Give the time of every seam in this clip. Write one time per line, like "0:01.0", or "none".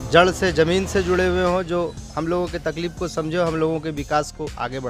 none